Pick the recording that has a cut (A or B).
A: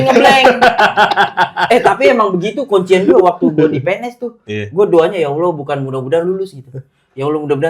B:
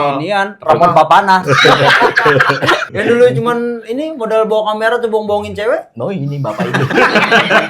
B